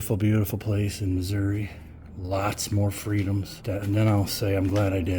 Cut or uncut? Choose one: cut